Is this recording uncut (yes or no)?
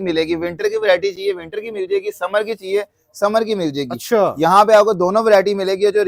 yes